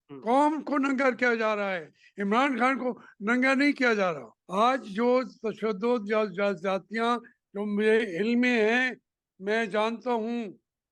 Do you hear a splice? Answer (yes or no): yes